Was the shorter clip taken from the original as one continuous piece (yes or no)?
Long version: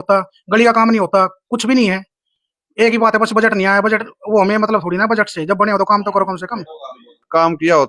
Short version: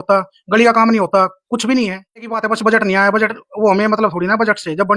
no